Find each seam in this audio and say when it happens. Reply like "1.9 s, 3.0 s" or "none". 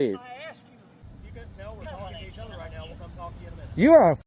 1.0 s

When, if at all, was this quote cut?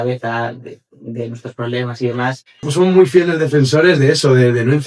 2.7 s

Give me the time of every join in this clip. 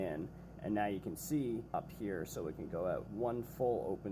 1.7 s, 3.1 s

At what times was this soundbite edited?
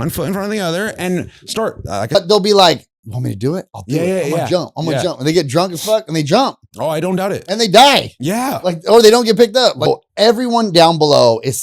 2.1 s, 9.9 s

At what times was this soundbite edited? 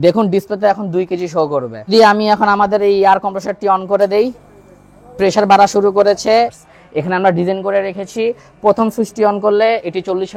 1.9 s, 6.6 s

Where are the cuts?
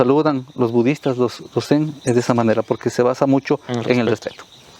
none

